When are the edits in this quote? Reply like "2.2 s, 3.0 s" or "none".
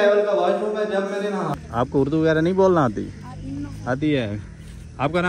1.5 s